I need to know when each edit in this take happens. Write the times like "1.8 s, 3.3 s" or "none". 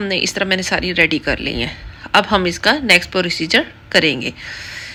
none

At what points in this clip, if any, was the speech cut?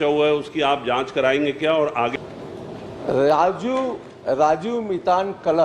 2.1 s

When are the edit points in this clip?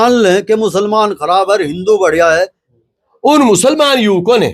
2.7 s

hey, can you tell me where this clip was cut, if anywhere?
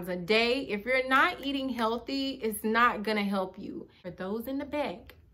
4.1 s

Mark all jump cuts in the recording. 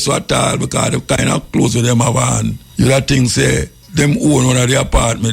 2.6 s, 3.8 s

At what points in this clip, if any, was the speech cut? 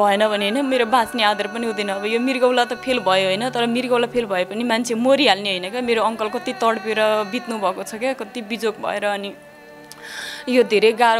none

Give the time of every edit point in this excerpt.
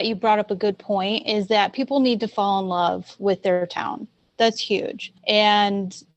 none

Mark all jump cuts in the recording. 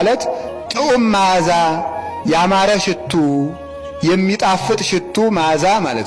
none

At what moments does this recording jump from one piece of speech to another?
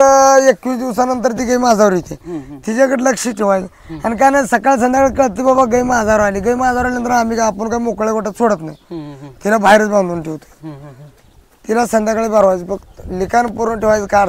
none

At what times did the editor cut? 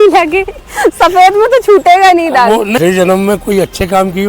2.8 s

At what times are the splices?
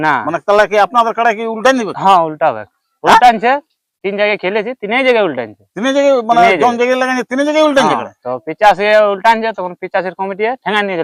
none

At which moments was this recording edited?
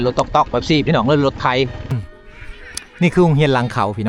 1.9 s

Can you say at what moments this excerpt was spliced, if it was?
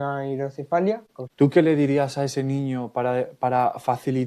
1.2 s

